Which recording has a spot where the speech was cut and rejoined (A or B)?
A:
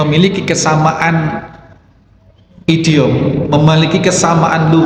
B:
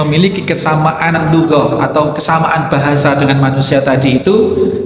B